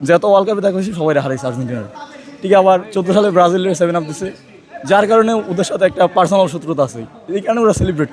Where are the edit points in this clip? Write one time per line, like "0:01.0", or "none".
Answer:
none